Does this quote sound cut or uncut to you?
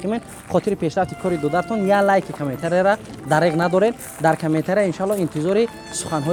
uncut